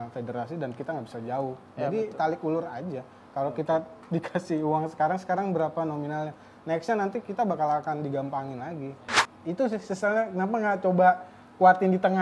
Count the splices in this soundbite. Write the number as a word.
one